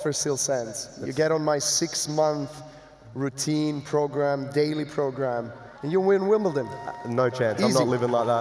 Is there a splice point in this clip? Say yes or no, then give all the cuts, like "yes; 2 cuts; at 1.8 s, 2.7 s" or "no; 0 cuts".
no; 0 cuts